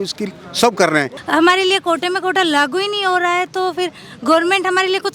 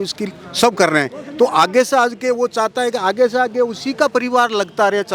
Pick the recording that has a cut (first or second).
first